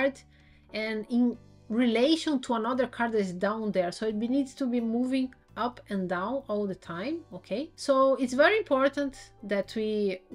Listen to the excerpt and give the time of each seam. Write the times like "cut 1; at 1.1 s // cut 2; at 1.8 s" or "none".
cut 1; at 7.8 s